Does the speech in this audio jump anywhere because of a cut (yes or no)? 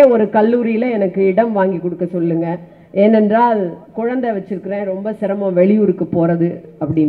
no